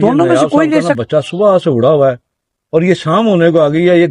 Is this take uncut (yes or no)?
yes